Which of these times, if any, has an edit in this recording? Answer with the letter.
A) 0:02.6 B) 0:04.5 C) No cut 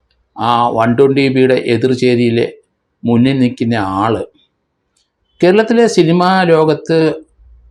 C